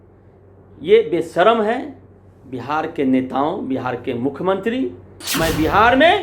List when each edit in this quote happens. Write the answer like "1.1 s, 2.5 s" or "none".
5.2 s